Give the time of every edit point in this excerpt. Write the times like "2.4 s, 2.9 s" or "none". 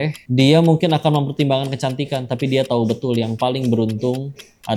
none